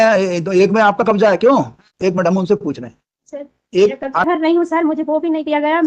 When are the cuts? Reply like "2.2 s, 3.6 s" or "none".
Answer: 4.2 s